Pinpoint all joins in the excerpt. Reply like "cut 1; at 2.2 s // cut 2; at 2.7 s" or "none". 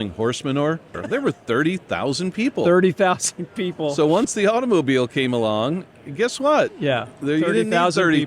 cut 1; at 1.0 s // cut 2; at 4.3 s